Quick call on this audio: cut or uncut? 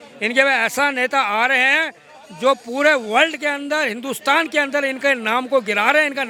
uncut